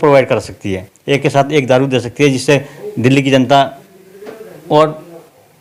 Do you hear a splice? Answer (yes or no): no